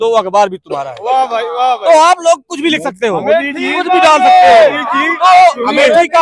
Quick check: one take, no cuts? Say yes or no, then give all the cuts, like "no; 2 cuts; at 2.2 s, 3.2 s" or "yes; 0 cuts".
yes; 0 cuts